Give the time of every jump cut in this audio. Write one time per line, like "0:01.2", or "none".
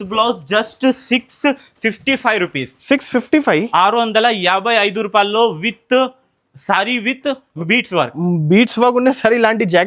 none